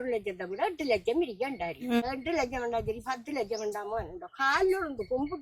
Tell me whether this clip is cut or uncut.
cut